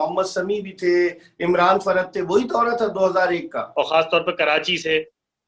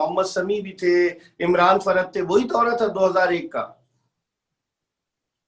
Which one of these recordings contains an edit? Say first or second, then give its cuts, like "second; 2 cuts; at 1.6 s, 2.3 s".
first; 1 cut; at 3.7 s